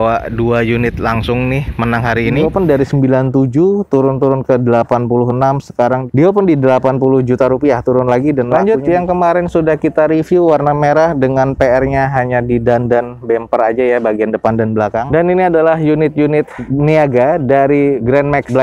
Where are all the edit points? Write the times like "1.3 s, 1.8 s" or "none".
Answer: 2.4 s, 8.5 s, 15.0 s